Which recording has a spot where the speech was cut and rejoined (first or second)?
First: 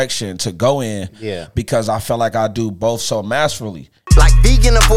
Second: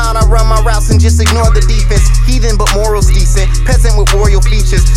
first